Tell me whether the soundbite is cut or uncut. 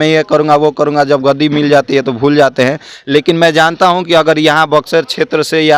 uncut